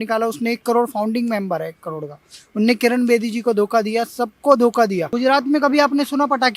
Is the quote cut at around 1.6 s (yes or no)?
no